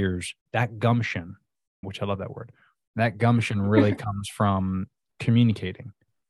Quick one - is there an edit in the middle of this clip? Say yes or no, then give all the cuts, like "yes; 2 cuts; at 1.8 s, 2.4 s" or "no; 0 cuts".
no; 0 cuts